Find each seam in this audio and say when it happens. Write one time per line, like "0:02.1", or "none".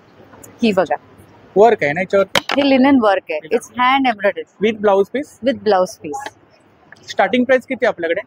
none